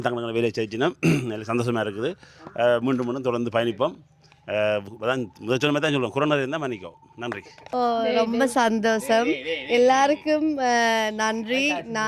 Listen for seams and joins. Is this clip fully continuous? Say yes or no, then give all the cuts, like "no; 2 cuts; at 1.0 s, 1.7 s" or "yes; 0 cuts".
yes; 0 cuts